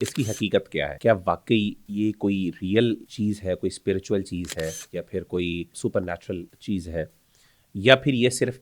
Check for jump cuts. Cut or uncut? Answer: cut